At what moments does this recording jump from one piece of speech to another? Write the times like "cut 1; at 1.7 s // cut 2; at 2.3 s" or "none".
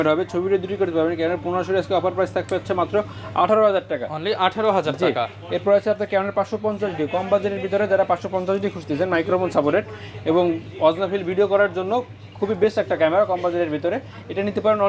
none